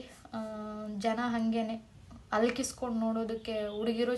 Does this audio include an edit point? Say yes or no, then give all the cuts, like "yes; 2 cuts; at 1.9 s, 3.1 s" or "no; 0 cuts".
no; 0 cuts